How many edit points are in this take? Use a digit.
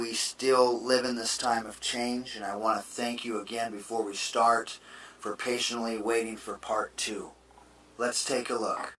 1